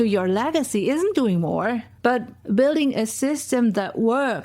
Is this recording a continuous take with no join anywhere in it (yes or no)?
no